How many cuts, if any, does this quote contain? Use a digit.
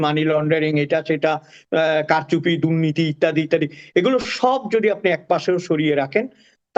0